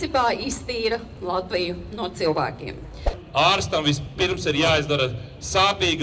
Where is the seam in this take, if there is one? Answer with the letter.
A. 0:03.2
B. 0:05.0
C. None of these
A